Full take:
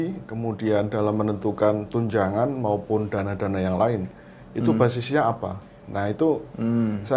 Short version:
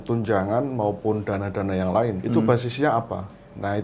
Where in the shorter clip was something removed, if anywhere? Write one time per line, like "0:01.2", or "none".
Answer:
0:02.2